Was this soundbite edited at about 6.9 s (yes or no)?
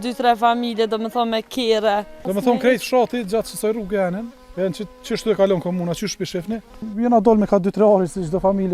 yes